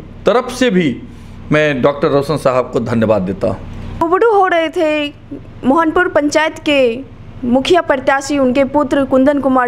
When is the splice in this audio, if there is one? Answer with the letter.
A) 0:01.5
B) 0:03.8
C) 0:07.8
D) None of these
D